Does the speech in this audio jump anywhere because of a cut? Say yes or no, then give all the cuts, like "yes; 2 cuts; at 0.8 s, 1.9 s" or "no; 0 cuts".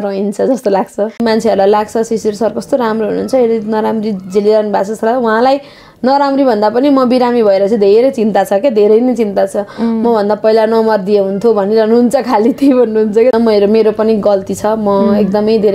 yes; 2 cuts; at 1.2 s, 13.3 s